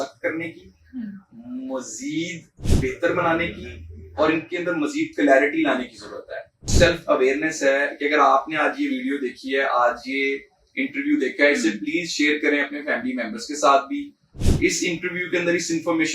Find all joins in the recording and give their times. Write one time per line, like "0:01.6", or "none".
0:06.7

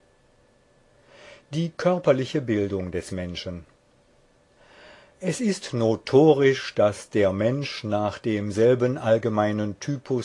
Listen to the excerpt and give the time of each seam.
0:07.3

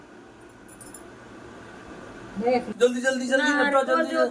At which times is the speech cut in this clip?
0:02.8

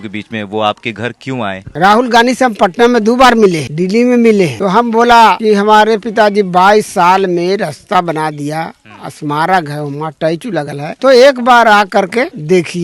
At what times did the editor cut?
none

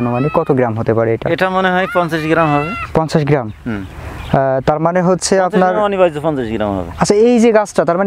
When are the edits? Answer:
none

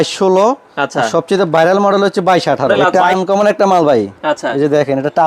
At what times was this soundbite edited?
0:02.7

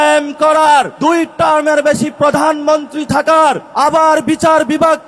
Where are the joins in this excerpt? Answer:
0:00.9
0:03.7

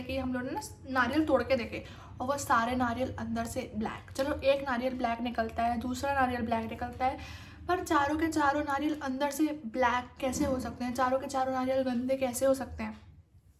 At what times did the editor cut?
none

